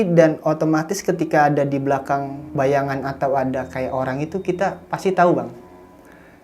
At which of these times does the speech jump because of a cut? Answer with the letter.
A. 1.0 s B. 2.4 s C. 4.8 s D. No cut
B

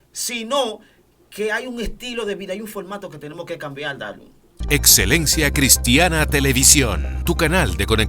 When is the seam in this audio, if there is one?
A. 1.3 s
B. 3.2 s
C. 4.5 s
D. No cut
C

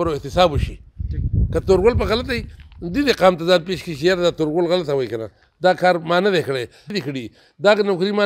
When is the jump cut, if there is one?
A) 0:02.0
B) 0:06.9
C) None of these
B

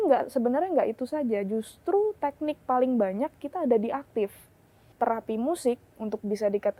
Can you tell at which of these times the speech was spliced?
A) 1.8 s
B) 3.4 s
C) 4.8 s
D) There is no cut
C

